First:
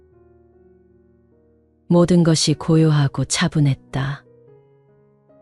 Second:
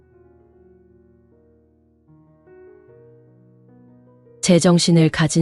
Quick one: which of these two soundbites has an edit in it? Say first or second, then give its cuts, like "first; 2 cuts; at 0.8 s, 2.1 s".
first; 1 cut; at 1.7 s